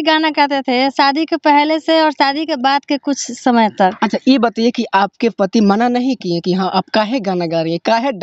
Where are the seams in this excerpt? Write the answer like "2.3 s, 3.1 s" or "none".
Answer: none